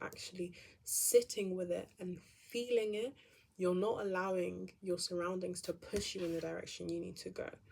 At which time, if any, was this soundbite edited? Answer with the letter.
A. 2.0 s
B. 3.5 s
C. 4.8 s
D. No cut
D